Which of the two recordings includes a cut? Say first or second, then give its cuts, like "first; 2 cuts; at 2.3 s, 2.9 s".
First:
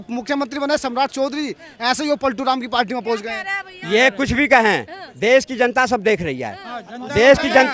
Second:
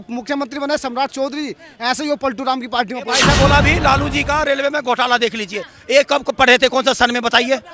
second; 1 cut; at 3.2 s